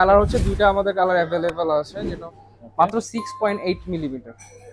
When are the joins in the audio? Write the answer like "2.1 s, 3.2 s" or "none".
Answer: 2.0 s